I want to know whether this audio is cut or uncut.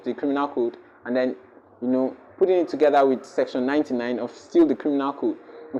uncut